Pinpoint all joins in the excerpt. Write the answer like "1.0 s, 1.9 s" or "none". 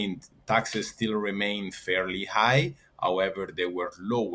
none